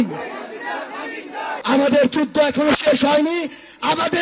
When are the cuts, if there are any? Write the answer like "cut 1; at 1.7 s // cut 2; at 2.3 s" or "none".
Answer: cut 1; at 1.6 s